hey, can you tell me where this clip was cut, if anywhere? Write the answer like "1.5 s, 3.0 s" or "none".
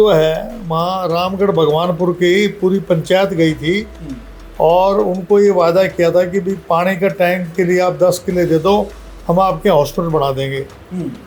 none